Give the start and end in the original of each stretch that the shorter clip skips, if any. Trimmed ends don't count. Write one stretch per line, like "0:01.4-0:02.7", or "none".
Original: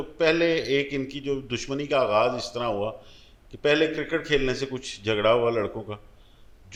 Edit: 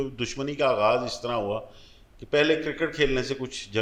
none